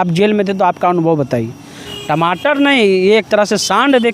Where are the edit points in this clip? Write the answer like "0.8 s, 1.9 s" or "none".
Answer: 1.9 s